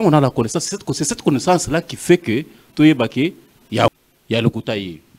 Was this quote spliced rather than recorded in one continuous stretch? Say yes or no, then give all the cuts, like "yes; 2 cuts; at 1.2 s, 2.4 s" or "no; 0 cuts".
yes; 1 cut; at 3.9 s